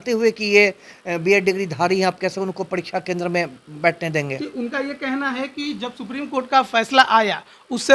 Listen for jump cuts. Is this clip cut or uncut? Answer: uncut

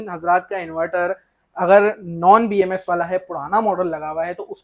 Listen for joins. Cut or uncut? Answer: uncut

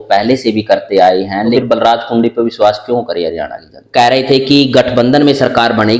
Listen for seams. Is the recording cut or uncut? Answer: cut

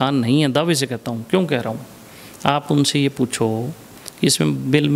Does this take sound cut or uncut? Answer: uncut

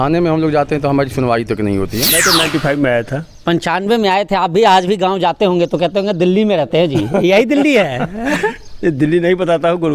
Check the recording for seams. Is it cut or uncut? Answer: cut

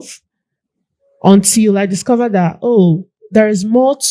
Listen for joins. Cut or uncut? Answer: cut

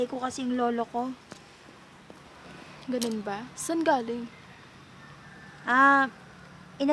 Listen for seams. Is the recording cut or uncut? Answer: uncut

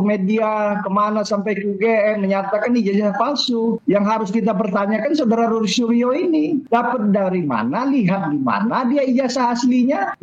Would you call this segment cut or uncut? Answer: uncut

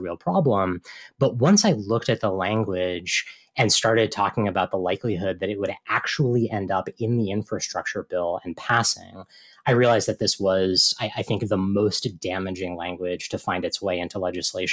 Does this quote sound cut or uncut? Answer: uncut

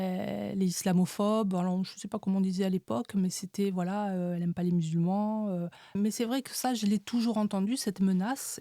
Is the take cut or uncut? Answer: cut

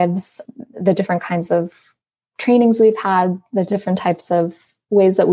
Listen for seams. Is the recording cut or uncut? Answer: uncut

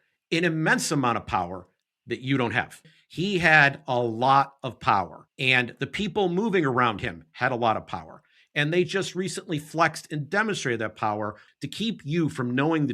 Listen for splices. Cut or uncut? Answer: cut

